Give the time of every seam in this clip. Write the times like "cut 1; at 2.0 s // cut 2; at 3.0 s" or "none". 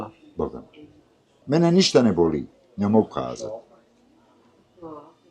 cut 1; at 1.4 s